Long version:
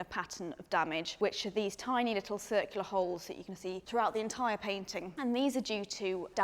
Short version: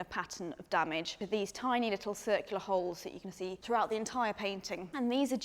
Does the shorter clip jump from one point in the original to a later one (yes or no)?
yes